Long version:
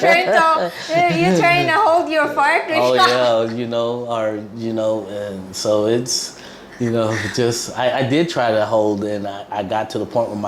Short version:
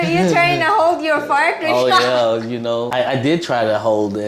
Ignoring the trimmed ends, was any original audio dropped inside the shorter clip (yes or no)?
yes